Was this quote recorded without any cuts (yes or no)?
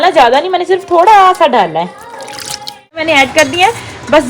no